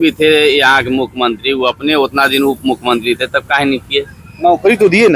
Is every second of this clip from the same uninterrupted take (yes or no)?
yes